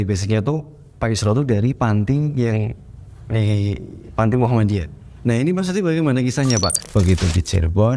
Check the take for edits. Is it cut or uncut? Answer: cut